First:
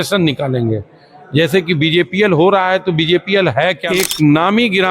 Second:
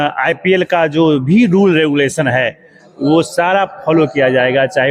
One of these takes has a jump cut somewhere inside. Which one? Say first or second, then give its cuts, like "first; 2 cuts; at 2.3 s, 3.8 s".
first; 1 cut; at 4.0 s